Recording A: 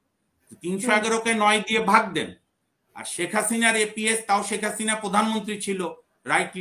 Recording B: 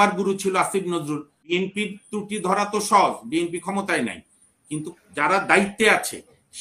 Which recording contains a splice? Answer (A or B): B